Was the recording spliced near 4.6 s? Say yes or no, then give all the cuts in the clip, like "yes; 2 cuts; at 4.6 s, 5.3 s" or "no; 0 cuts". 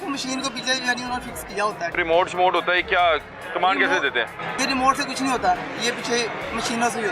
yes; 2 cuts; at 2.0 s, 4.6 s